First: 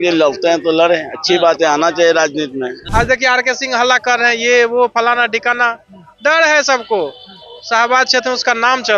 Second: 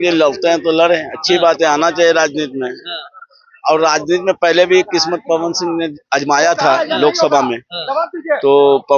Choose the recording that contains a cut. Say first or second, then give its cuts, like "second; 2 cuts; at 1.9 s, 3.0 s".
first; 1 cut; at 2.8 s